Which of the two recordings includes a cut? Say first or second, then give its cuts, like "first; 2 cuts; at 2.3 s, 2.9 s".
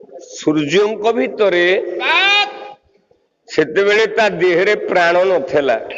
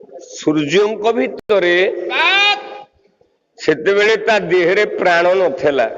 first; 1 cut; at 1.3 s